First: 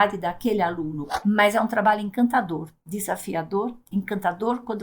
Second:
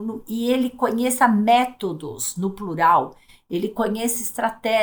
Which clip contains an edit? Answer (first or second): first